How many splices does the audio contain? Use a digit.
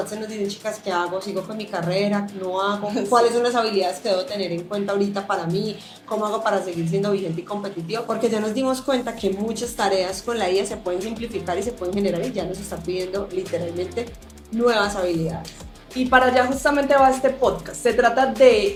0